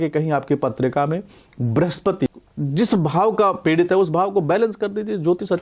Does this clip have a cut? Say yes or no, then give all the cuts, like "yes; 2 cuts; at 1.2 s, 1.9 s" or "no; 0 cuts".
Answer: yes; 1 cut; at 2.3 s